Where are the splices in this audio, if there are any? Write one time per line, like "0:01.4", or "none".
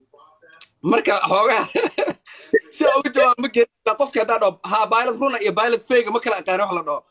none